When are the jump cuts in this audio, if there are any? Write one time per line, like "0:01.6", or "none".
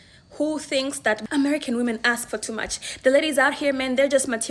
0:01.2